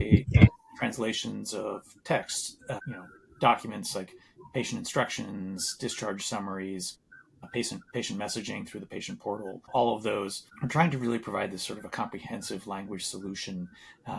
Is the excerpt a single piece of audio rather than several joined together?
yes; 0 cuts

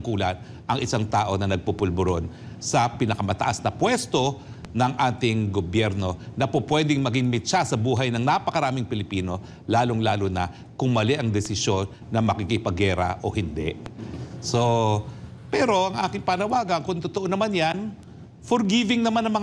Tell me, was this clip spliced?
no; 0 cuts

